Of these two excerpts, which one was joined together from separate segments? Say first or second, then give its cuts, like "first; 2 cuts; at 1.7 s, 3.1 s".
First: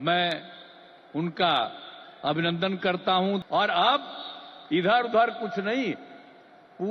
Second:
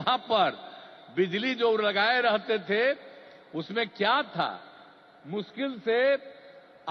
first; 1 cut; at 3.4 s